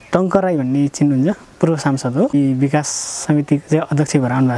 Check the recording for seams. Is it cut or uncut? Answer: cut